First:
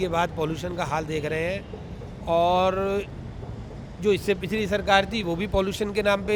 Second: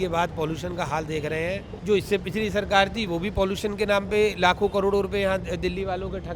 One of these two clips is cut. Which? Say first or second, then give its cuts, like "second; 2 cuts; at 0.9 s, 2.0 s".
second; 1 cut; at 1.7 s